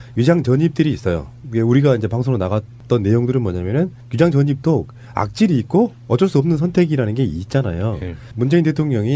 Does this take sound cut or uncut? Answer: cut